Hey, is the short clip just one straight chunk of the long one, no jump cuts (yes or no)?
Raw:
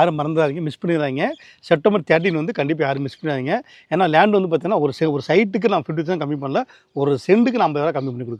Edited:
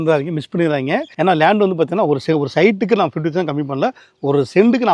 no